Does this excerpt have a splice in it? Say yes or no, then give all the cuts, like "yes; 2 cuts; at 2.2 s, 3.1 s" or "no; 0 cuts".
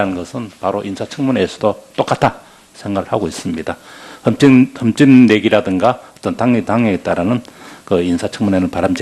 no; 0 cuts